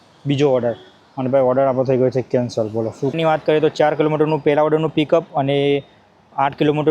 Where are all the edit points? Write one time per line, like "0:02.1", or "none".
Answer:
0:03.1